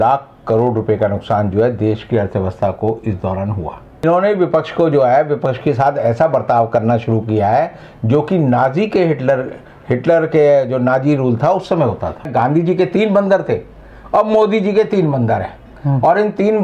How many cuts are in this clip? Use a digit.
2